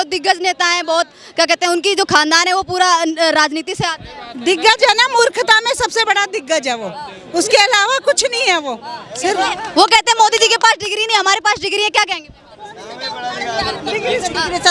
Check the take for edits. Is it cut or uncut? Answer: uncut